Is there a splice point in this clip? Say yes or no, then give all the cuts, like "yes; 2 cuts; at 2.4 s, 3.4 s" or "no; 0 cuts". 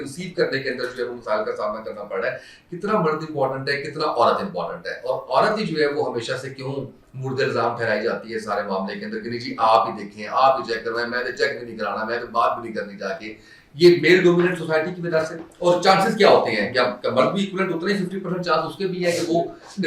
no; 0 cuts